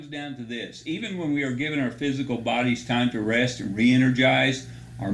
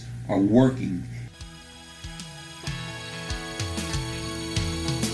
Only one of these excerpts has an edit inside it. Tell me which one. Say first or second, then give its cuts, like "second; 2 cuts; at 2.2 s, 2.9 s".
second; 1 cut; at 1.3 s